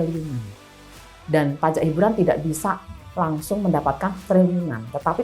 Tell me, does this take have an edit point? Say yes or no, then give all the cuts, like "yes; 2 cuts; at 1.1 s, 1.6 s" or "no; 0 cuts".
no; 0 cuts